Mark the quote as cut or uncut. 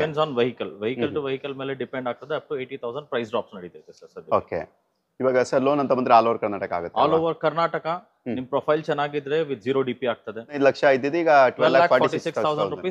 cut